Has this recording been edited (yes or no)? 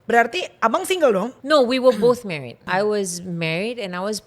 yes